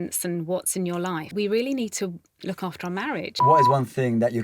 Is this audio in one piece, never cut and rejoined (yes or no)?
no